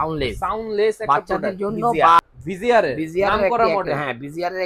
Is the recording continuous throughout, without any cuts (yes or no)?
no